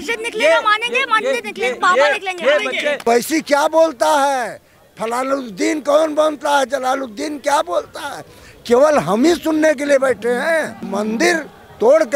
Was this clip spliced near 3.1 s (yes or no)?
yes